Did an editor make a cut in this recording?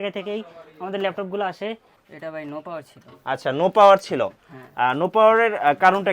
yes; 1 cut; at 2.0 s

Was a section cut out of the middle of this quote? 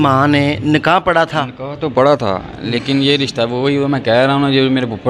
no; 0 cuts

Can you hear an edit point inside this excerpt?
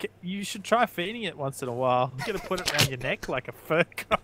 yes; 1 cut; at 2.2 s

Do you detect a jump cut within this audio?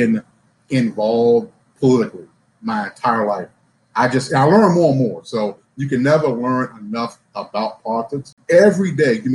yes; 1 cut; at 8.3 s

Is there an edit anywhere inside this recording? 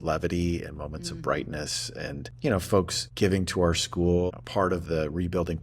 yes; 3 cuts; at 2.3 s, 3.0 s, 4.3 s

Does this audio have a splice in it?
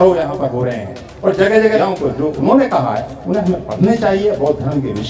yes; 1 cut; at 1.8 s

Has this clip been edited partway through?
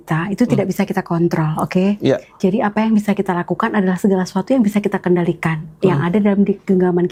no; 0 cuts

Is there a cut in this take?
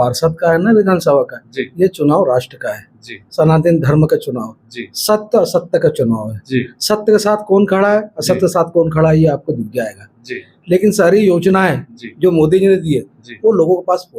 no; 0 cuts

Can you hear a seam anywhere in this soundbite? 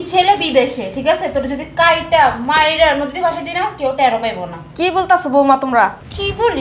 no; 0 cuts

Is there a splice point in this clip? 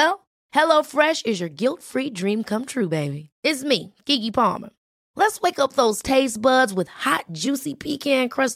no; 0 cuts

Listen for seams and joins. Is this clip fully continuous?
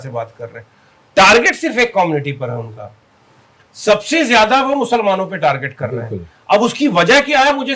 yes; 0 cuts

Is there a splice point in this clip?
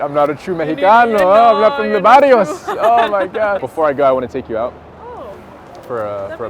yes; 1 cut; at 3.7 s

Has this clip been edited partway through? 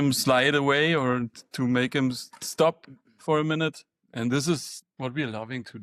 no; 0 cuts

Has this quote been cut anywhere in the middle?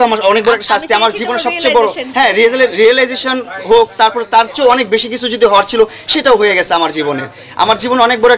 no; 0 cuts

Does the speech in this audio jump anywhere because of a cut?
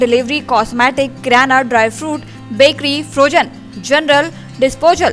no; 0 cuts

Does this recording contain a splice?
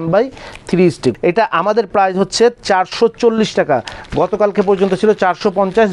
yes; 1 cut; at 1.1 s

